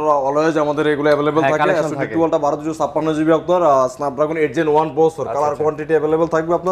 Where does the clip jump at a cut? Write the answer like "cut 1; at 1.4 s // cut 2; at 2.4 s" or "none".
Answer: none